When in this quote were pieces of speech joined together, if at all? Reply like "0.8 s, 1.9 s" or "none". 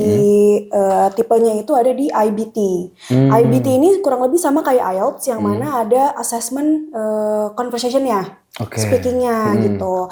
none